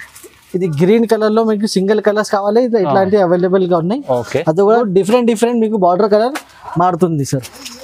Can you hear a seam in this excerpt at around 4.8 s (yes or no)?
yes